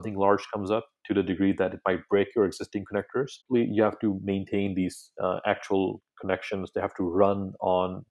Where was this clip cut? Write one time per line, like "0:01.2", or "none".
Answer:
none